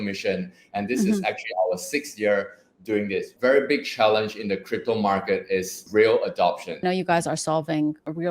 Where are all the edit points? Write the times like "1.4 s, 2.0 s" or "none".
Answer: 3.3 s, 6.8 s